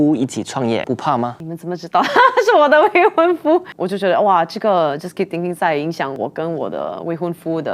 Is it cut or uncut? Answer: cut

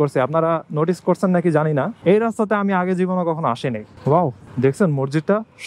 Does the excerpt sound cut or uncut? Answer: cut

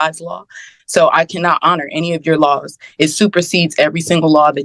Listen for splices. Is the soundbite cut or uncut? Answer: uncut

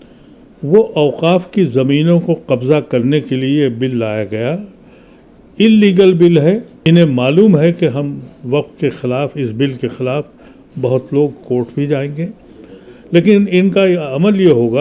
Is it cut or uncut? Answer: cut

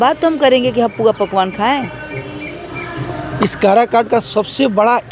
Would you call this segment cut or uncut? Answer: uncut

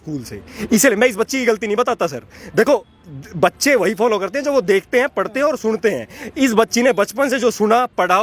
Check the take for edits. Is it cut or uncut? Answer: uncut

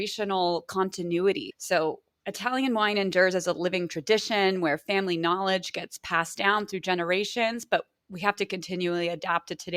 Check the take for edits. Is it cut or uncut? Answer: uncut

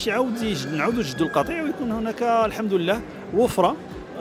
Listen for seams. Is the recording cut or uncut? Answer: uncut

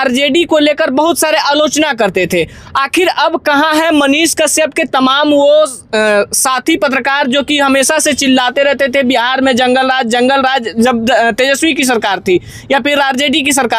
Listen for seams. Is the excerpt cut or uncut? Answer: uncut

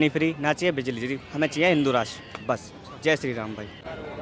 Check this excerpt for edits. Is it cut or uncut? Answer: uncut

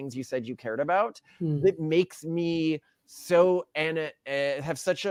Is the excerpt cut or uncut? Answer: uncut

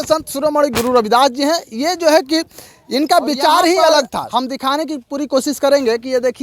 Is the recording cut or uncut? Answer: cut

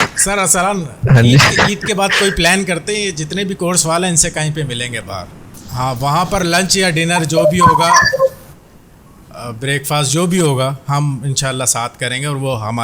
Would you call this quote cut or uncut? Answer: cut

